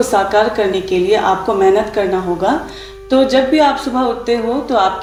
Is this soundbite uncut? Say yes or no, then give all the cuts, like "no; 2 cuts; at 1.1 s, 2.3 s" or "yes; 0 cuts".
yes; 0 cuts